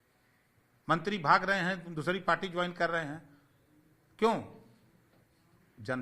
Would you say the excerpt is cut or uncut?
uncut